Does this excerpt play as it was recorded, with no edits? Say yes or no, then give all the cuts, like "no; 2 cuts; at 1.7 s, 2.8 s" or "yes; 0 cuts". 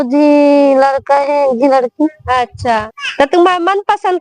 no; 1 cut; at 2.9 s